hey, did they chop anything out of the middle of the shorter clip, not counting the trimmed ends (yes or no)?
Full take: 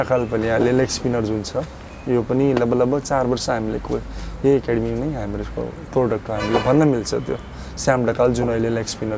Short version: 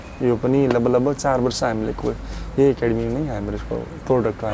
no